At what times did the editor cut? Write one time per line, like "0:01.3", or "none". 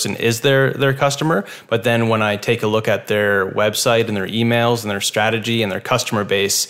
none